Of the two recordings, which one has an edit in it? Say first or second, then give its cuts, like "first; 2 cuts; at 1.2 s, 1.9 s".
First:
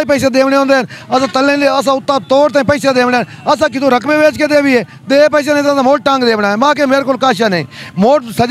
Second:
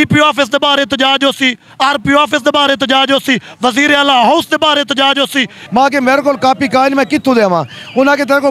second; 1 cut; at 5.6 s